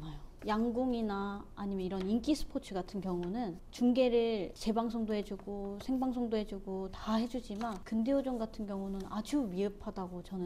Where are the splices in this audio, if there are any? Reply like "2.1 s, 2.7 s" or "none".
none

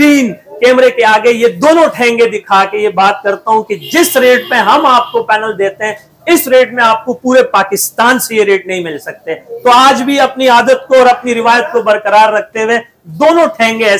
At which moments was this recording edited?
none

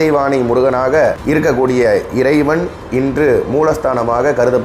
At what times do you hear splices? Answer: 1.2 s

